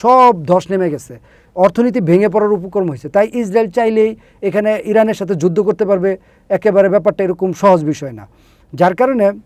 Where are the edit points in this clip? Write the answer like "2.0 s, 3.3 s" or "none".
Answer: none